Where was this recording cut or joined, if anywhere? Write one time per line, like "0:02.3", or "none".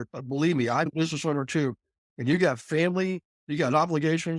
0:00.9